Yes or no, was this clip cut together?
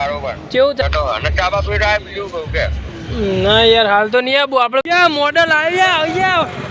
yes